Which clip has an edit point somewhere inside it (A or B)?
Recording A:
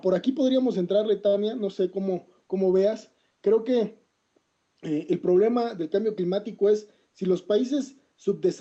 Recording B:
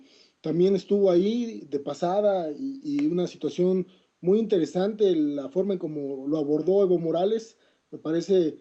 B